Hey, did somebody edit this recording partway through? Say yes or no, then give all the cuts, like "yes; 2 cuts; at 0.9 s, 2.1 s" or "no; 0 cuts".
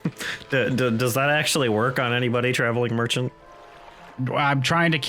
no; 0 cuts